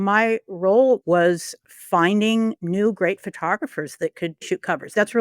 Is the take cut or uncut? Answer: cut